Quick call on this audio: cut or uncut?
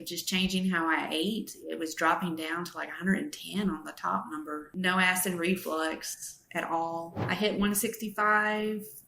cut